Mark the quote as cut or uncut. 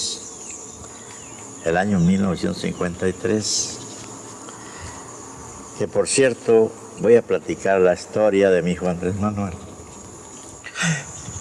cut